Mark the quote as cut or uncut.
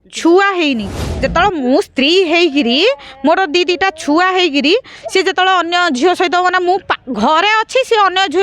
cut